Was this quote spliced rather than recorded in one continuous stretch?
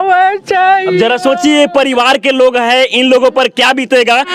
no; 0 cuts

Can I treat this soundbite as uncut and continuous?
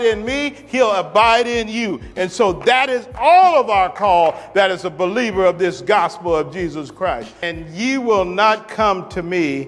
no; 1 cut; at 7.5 s

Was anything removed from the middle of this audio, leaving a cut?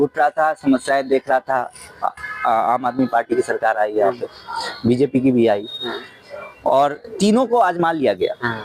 no; 0 cuts

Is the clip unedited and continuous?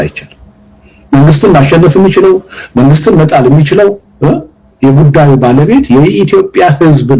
yes; 0 cuts

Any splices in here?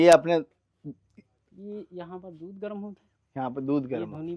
no; 0 cuts

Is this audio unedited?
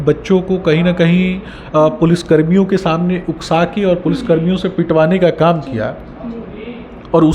yes; 0 cuts

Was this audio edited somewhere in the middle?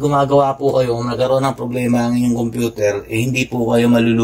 no; 0 cuts

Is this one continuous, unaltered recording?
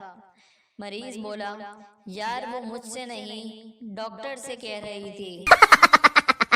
no; 1 cut; at 5.4 s

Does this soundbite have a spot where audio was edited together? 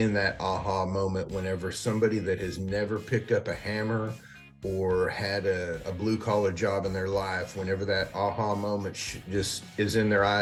no; 0 cuts

